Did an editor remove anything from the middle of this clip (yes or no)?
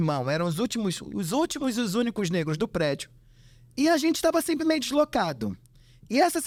no